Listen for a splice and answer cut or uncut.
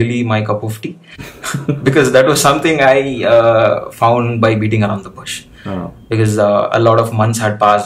uncut